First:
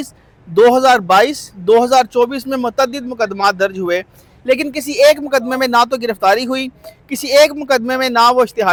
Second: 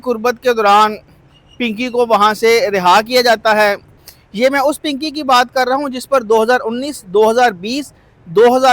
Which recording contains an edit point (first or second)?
second